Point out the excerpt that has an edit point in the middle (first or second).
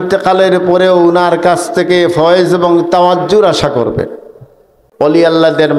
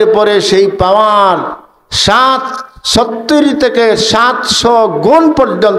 first